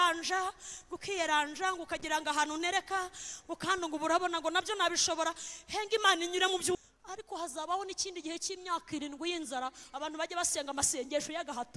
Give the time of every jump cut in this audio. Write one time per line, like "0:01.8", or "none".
0:06.8